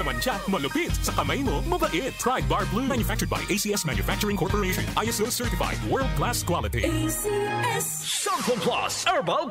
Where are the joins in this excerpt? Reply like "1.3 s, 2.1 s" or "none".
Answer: 7.9 s